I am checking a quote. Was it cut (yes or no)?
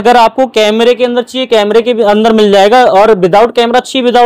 no